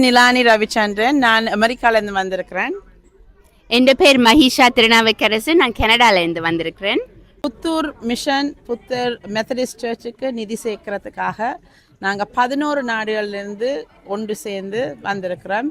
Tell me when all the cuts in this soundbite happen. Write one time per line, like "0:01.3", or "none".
0:07.3